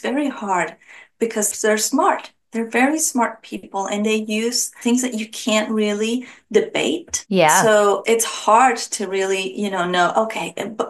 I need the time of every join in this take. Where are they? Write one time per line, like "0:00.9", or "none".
0:01.5
0:08.0